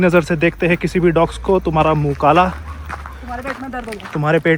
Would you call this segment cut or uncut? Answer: uncut